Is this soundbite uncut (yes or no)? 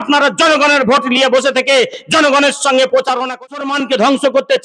no